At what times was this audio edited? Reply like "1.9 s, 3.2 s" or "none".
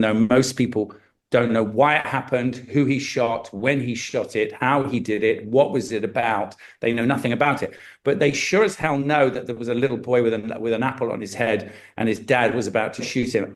none